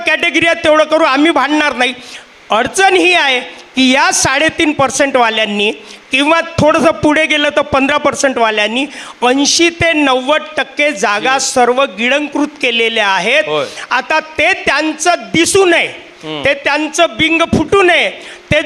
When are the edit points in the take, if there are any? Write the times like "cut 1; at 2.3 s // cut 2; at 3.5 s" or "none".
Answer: none